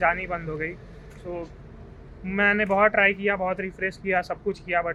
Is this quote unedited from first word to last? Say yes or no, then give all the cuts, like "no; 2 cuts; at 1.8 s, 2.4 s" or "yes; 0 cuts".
yes; 0 cuts